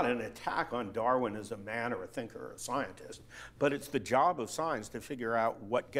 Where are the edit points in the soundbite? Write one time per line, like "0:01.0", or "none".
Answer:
none